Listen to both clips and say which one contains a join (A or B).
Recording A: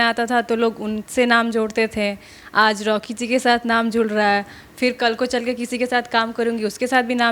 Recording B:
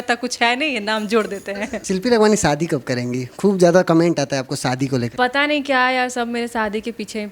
B